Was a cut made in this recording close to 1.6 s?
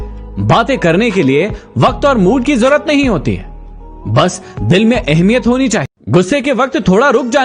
no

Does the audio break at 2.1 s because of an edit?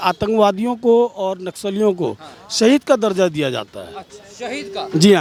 no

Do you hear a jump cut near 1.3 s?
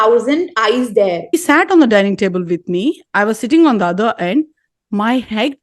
yes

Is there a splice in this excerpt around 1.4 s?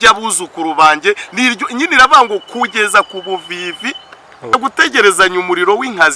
no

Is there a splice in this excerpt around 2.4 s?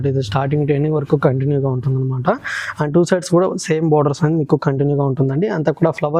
no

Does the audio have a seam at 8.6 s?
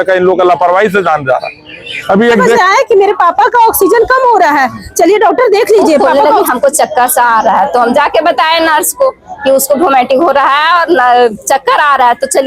no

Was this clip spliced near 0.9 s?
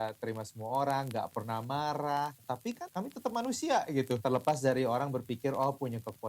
no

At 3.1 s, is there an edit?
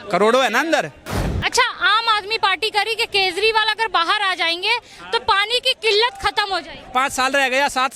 no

